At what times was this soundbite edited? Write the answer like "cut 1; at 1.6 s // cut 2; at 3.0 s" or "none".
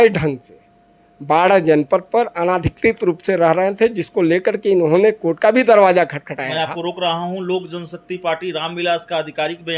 none